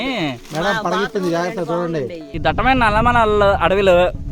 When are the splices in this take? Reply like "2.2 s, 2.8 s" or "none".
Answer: 2.2 s